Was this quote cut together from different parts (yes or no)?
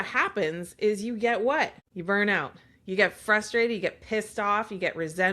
yes